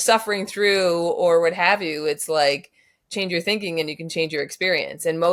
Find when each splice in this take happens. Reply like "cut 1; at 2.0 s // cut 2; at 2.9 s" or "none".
none